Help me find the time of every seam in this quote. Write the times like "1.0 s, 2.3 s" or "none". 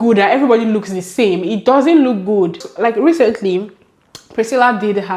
2.6 s